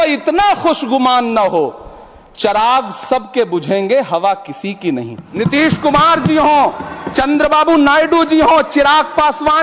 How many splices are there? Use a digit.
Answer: 1